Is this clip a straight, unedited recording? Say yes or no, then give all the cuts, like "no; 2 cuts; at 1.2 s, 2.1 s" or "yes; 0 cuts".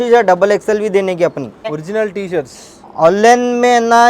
no; 1 cut; at 1.7 s